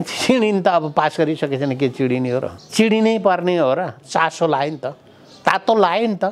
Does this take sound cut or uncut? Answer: cut